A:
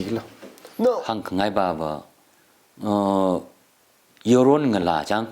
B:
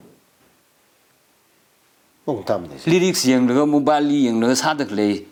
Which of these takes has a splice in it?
A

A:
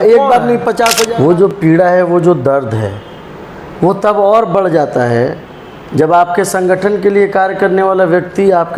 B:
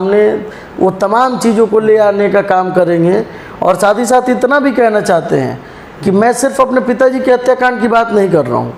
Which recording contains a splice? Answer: A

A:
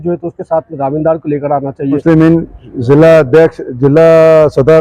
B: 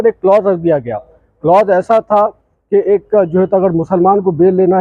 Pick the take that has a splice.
A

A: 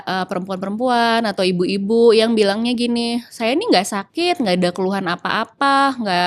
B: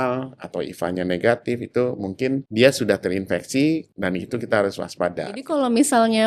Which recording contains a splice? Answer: B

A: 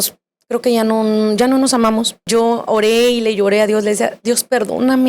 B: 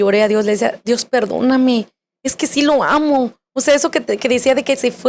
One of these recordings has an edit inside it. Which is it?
A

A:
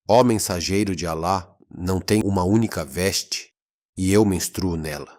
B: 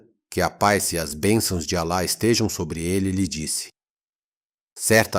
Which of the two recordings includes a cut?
A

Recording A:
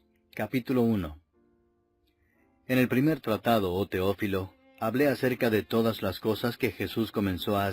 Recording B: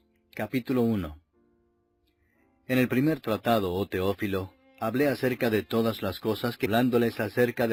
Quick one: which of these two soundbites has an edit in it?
A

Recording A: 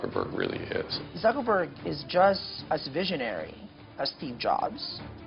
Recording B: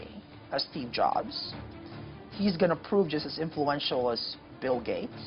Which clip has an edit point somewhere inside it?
A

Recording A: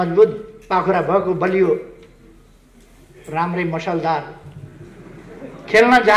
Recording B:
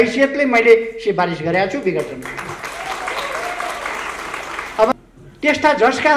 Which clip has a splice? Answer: B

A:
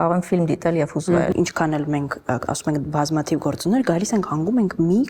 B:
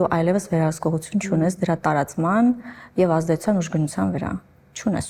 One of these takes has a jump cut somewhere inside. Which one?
A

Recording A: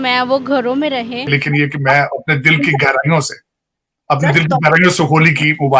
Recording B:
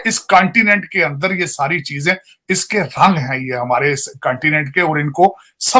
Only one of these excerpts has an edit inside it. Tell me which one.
A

